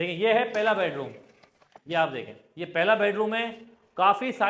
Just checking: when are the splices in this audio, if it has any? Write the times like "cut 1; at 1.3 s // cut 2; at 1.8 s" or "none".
none